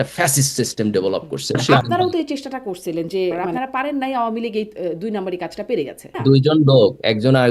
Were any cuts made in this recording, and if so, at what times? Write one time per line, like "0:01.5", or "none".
0:01.6
0:03.4
0:06.1